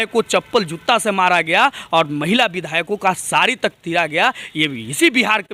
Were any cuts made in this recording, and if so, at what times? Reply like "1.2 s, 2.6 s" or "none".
none